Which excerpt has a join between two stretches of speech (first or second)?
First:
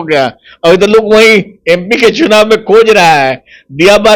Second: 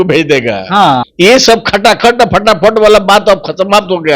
second